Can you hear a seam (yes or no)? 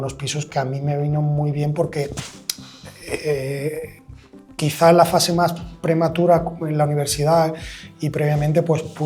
no